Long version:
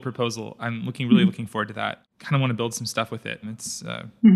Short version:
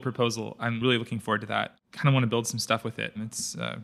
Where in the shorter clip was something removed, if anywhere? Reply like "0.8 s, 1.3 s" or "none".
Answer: 1.1 s